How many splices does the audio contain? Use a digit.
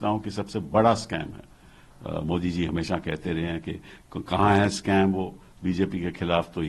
0